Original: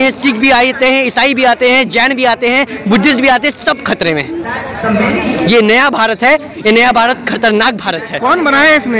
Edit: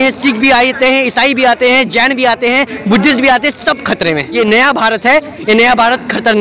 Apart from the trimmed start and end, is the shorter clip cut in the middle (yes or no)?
yes